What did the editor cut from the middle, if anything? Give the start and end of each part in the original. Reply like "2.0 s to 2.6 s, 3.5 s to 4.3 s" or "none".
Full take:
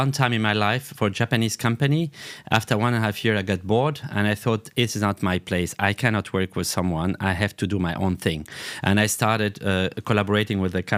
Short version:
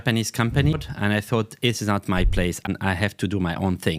2.0 s to 3.9 s, 5.8 s to 7.1 s